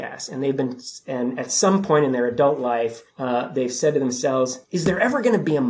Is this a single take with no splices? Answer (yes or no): no